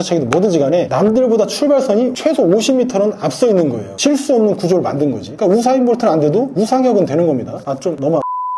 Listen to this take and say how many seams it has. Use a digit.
0